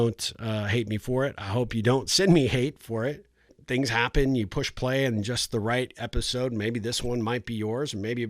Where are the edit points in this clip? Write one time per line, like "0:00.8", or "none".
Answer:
0:03.6

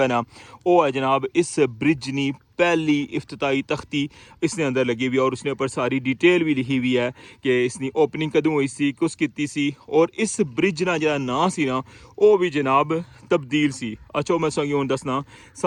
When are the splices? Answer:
none

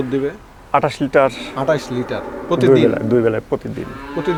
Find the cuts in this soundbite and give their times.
none

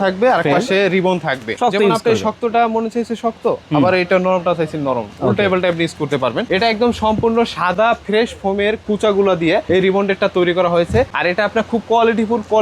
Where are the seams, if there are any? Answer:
0:01.5
0:06.4

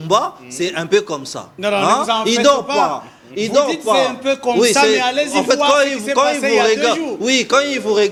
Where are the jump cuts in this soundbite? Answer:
none

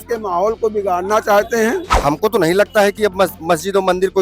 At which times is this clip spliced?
0:01.9

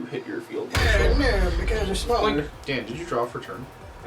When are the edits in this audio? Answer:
0:02.5

